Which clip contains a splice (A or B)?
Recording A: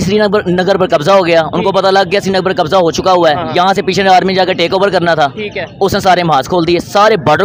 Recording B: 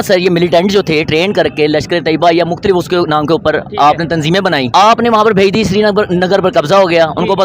B